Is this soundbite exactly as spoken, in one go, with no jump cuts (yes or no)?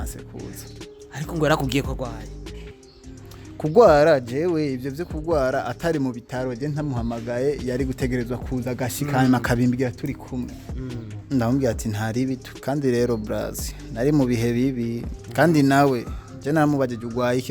no